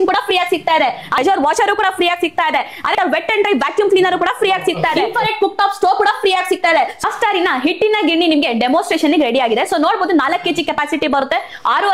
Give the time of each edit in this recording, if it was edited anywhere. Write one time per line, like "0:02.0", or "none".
0:01.2
0:02.9
0:05.0
0:07.0